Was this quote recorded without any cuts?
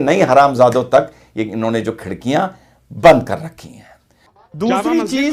yes; 0 cuts

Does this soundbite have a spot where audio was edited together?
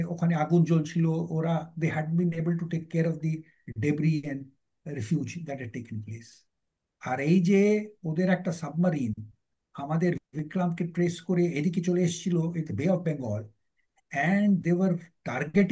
no; 0 cuts

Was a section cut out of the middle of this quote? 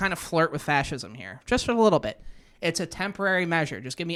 no; 0 cuts

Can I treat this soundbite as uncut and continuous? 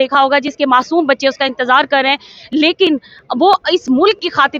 yes; 0 cuts

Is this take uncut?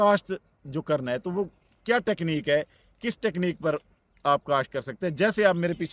yes; 0 cuts

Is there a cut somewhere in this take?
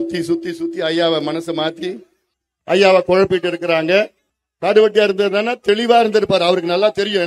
no; 0 cuts

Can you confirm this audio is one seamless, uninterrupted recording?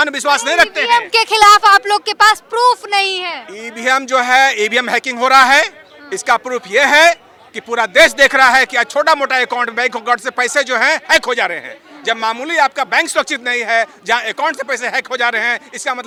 yes; 0 cuts

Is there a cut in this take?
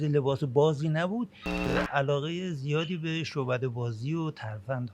yes; 1 cut; at 1.7 s

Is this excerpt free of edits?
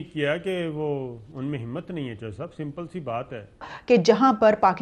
no; 1 cut; at 3.7 s

